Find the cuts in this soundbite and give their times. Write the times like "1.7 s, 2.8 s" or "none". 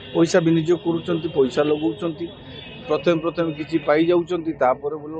none